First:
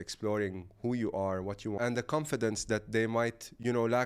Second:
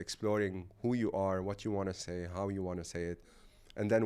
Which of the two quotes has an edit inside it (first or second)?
first